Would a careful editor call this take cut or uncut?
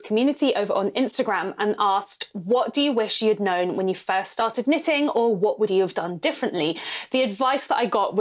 uncut